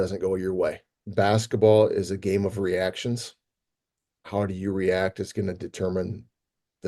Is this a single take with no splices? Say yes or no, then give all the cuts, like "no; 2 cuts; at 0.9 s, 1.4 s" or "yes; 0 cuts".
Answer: no; 1 cut; at 1.1 s